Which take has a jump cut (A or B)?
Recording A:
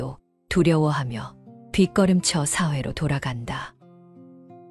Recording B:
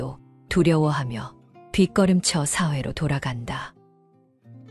A